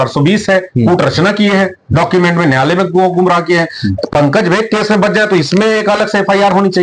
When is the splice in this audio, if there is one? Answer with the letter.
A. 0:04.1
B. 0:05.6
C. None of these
C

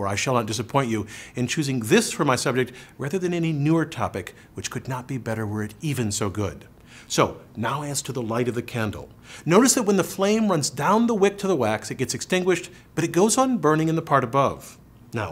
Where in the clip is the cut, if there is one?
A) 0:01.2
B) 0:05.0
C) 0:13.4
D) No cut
A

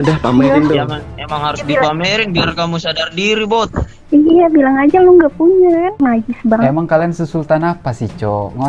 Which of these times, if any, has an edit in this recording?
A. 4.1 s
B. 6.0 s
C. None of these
B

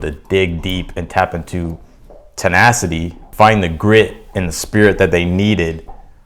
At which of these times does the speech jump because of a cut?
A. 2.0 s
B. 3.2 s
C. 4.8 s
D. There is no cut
B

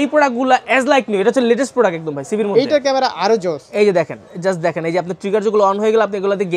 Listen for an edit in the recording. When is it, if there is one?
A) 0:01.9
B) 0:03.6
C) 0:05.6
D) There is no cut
B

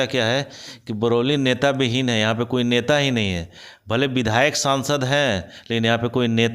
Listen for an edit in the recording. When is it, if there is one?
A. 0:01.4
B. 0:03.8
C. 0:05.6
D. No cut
D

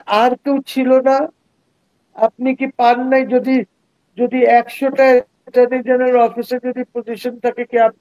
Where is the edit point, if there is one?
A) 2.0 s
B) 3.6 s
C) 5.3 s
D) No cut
D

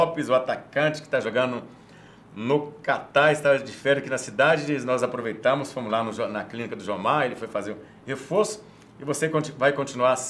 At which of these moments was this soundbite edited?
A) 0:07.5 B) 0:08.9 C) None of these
C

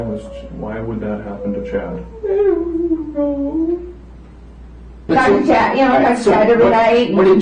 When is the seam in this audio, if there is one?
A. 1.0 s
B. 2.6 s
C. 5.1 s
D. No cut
C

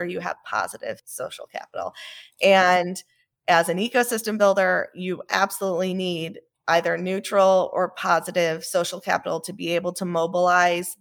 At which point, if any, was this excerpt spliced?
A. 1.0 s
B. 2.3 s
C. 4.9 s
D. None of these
A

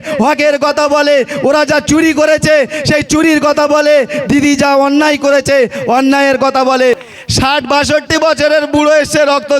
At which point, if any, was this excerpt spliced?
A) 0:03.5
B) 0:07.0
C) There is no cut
B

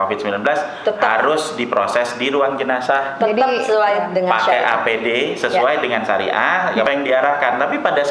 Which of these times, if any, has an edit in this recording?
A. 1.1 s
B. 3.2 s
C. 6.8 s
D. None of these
C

